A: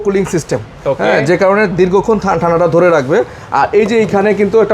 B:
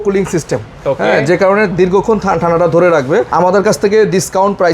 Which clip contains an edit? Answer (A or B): B